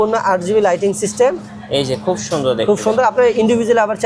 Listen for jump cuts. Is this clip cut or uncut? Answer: uncut